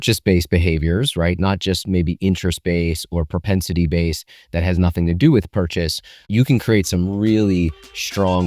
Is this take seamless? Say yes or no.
no